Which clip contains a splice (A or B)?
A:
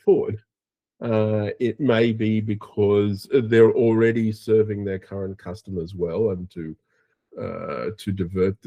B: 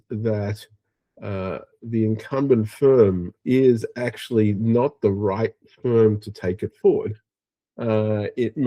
B